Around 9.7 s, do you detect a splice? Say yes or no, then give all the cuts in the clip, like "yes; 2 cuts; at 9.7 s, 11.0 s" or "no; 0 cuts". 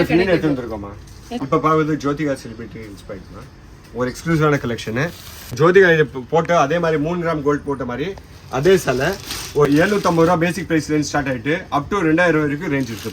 yes; 3 cuts; at 1.4 s, 5.5 s, 9.7 s